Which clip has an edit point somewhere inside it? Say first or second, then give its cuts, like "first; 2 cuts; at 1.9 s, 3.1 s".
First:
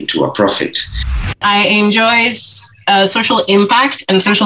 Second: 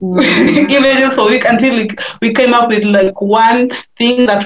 first; 1 cut; at 1.3 s